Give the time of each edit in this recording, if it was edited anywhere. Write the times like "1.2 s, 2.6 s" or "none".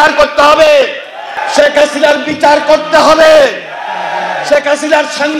1.3 s